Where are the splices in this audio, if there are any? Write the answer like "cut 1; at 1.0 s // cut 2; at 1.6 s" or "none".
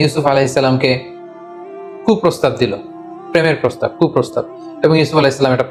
none